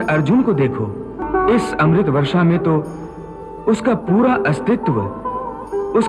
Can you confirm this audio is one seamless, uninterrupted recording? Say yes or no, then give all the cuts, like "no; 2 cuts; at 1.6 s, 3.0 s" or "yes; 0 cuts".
no; 1 cut; at 1.2 s